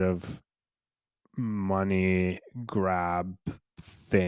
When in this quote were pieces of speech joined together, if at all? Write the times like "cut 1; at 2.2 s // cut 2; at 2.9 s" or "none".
none